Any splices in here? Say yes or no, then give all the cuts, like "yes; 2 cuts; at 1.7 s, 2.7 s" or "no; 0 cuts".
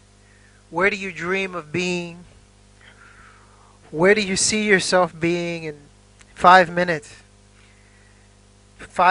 no; 0 cuts